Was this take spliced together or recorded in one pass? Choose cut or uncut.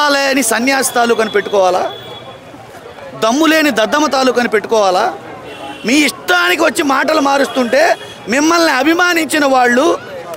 uncut